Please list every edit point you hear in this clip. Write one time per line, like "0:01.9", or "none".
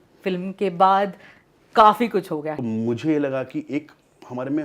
0:02.5